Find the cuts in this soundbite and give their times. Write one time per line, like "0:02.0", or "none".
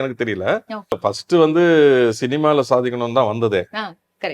0:01.0